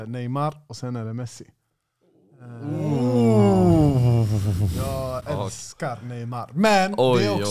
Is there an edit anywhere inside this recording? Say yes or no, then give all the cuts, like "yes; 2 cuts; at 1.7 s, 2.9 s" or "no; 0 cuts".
no; 0 cuts